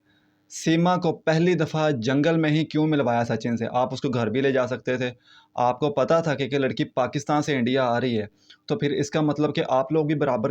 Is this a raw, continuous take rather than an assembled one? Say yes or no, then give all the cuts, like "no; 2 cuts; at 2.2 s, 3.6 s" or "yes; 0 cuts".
yes; 0 cuts